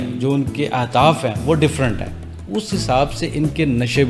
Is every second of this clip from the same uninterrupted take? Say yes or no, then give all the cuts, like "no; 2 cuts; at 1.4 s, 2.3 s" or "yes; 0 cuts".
yes; 0 cuts